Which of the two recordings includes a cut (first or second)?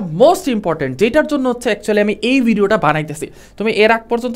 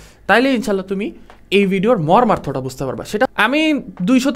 second